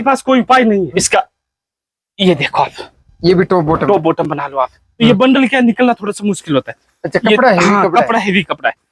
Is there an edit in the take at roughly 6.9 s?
no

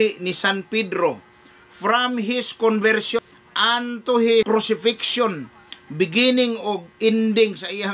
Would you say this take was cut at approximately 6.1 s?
no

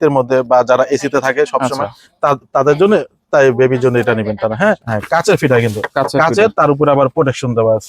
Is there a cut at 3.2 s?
no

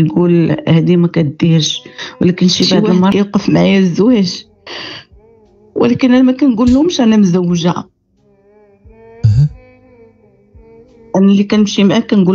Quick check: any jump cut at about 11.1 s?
no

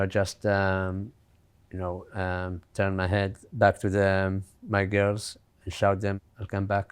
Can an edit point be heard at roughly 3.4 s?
yes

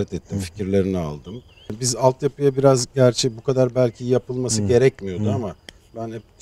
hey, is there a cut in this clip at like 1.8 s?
yes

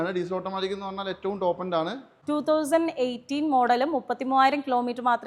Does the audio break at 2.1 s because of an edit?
yes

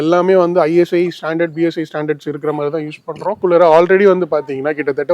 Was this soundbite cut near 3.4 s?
yes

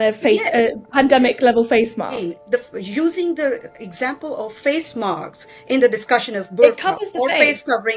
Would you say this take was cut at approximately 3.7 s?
no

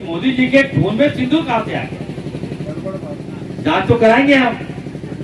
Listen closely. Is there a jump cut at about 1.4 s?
no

